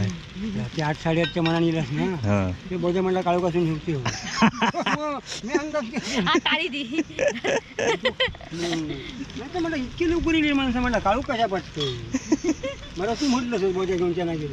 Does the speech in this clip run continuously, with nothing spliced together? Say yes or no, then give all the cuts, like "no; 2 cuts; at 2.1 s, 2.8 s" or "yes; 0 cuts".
yes; 0 cuts